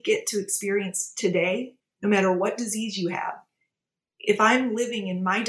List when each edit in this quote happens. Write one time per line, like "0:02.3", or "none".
0:01.7